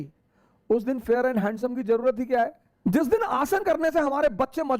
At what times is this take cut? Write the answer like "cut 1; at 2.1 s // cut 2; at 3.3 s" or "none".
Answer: cut 1; at 2.6 s